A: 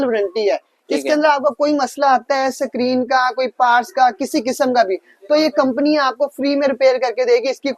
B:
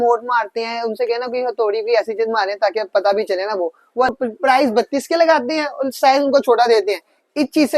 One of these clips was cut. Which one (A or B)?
B